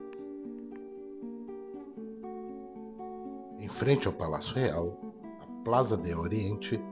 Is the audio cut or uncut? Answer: uncut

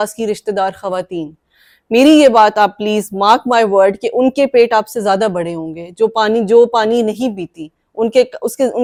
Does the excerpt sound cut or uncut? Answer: uncut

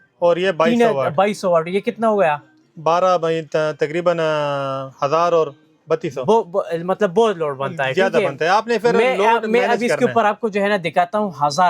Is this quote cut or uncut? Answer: uncut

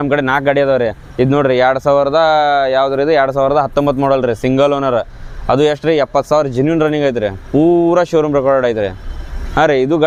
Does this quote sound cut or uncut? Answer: uncut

